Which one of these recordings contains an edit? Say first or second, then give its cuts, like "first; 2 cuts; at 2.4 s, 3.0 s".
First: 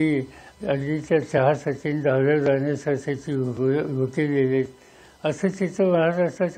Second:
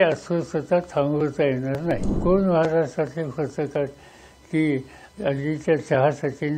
second; 1 cut; at 2.1 s